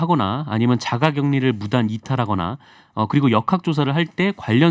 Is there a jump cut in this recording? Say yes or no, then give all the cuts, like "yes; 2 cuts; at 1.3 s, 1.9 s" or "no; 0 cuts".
no; 0 cuts